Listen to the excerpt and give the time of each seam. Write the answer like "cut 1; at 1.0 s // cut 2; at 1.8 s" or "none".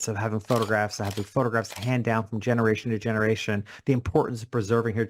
none